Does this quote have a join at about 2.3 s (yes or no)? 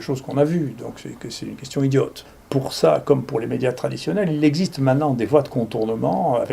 yes